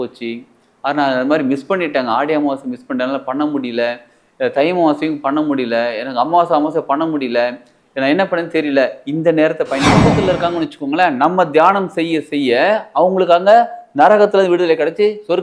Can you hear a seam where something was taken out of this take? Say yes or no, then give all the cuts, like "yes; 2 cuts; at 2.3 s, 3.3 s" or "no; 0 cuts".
yes; 1 cut; at 10.2 s